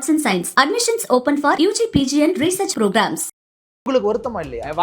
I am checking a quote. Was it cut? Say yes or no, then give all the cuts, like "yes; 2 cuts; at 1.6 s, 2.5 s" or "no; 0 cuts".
yes; 1 cut; at 3.9 s